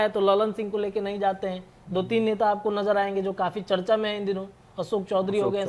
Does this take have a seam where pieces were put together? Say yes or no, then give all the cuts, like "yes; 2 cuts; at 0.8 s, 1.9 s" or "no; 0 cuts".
no; 0 cuts